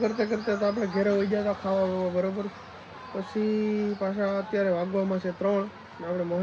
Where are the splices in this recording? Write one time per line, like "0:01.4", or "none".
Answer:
none